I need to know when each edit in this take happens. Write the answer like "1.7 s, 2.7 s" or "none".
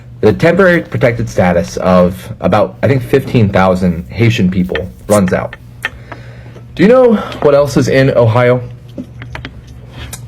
3.3 s, 7.5 s

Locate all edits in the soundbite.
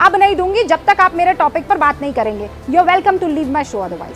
none

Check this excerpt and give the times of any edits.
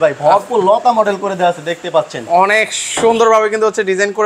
none

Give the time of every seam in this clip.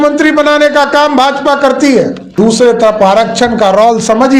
2.3 s

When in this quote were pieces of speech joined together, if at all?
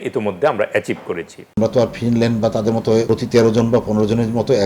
1.4 s, 3.1 s

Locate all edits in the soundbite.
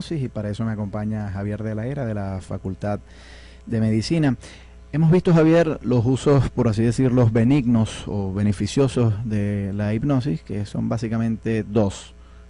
none

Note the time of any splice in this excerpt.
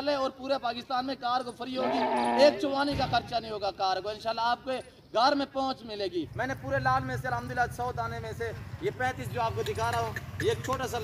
6.3 s

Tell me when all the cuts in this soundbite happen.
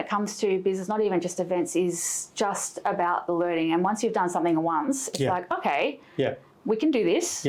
none

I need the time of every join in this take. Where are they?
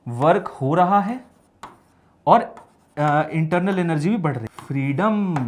4.5 s

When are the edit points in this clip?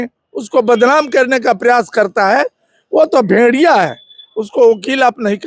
none

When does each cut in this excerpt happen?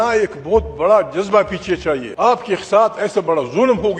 2.1 s

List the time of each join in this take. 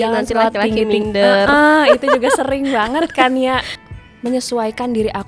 3.8 s

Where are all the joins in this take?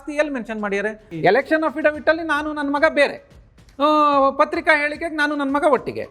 1.0 s

